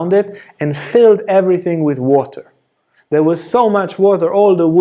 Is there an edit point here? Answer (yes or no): no